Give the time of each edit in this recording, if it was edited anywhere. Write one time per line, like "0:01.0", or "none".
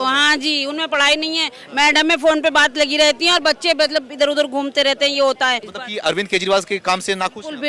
0:05.7